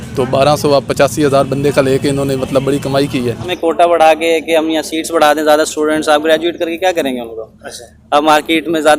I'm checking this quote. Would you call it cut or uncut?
cut